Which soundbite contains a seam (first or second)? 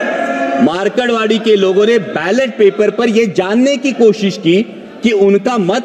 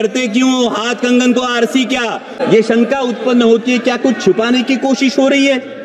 second